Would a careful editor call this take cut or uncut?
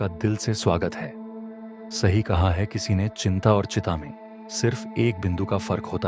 uncut